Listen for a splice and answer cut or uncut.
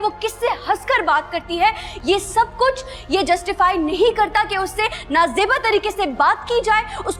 uncut